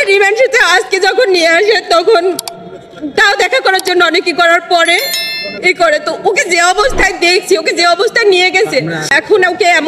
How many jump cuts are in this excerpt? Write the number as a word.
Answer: zero